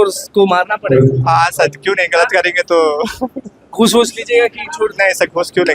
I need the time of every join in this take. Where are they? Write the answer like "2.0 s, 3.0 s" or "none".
none